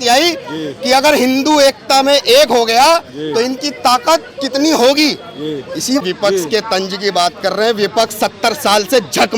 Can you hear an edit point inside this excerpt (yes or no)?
yes